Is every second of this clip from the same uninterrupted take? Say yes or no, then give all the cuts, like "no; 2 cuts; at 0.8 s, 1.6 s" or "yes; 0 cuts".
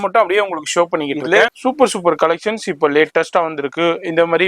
no; 1 cut; at 1.6 s